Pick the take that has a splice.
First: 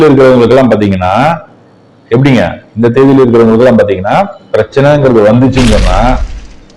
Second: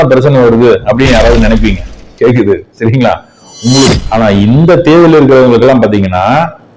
second; 1 cut; at 3.9 s

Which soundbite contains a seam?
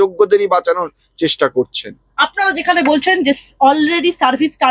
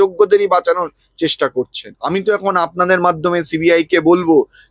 second; 1 cut; at 1.9 s

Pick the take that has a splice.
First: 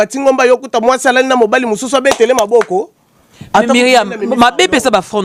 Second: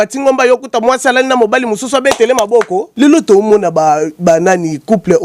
second; 1 cut; at 2.8 s

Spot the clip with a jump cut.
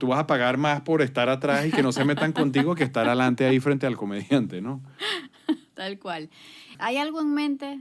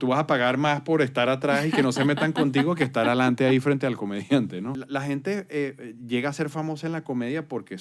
second; 1 cut; at 4.8 s

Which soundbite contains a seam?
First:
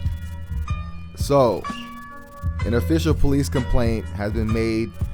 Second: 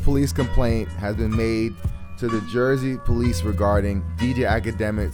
first; 1 cut; at 1.0 s

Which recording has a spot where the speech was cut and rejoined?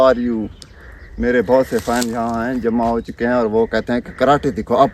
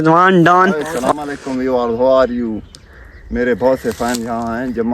second; 1 cut; at 0.9 s

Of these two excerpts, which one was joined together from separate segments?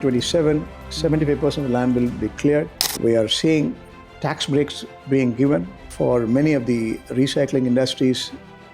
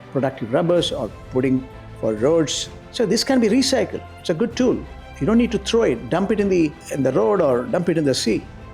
first; 2 cuts; at 2.8 s, 5.8 s

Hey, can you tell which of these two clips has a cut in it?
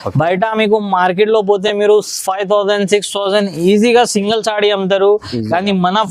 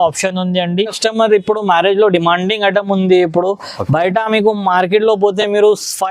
second; 1 cut; at 1.0 s

